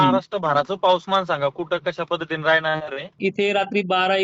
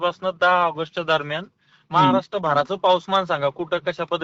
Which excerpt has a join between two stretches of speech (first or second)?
first